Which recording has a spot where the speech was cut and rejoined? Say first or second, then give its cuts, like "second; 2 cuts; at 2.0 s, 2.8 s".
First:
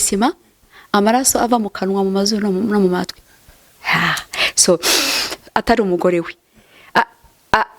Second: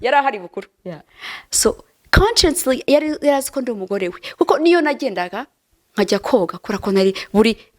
first; 1 cut; at 5.3 s